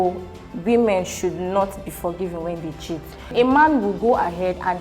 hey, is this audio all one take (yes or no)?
no